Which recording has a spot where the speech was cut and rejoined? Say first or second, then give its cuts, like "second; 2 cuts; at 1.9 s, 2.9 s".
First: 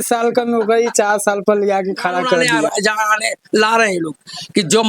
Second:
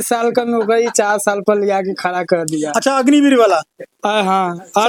first; 1 cut; at 2.6 s